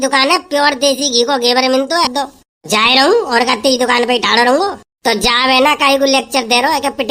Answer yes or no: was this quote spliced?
yes